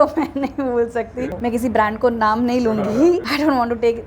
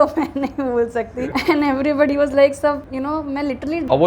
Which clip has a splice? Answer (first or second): first